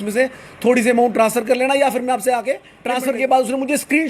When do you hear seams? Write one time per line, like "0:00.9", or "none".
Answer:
0:02.7